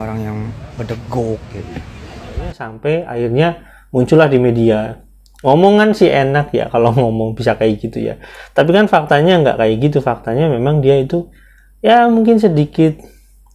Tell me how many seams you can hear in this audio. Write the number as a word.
one